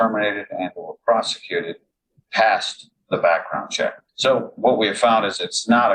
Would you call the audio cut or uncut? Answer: cut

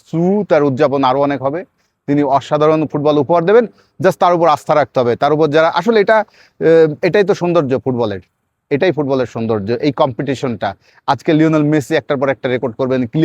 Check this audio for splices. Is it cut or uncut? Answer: uncut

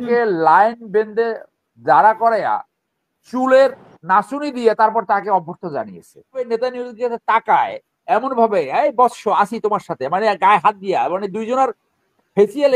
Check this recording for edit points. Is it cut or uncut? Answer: cut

